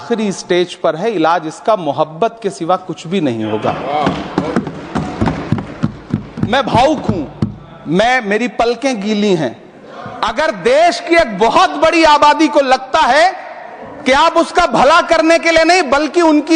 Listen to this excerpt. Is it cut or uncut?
uncut